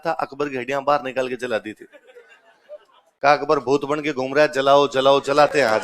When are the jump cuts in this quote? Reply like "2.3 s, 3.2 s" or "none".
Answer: none